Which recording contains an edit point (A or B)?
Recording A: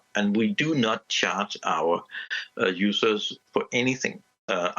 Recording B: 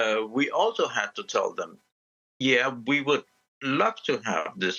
A